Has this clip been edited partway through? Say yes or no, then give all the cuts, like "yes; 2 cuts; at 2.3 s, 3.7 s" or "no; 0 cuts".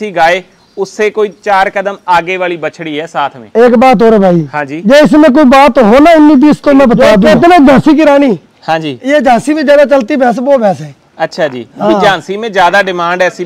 yes; 1 cut; at 7.1 s